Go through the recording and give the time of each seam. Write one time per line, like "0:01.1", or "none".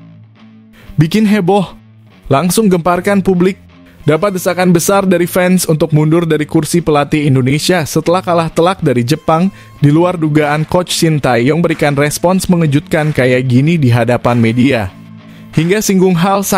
0:01.0